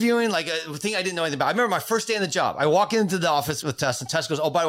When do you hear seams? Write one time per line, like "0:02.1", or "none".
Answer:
0:03.6